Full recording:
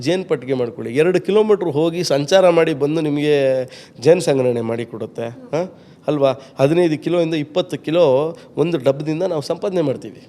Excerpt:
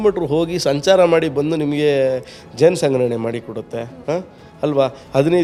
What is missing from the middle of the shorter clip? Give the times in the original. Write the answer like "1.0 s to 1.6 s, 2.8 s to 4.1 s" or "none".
none